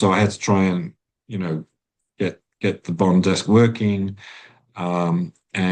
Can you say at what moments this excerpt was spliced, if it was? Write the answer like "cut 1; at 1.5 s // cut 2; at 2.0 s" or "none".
none